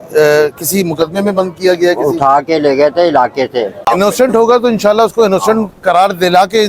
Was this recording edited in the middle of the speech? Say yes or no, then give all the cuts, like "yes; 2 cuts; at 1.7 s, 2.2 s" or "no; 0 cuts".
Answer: yes; 1 cut; at 3.8 s